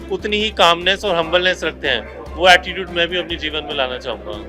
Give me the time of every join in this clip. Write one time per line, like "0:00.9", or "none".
none